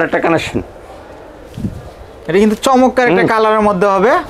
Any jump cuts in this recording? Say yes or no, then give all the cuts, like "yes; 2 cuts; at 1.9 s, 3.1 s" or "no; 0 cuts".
no; 0 cuts